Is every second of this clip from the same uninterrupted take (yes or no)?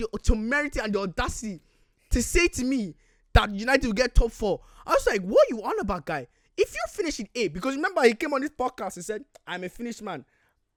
yes